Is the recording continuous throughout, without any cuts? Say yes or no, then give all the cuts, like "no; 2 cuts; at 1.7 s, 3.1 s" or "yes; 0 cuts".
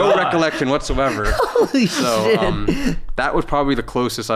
yes; 0 cuts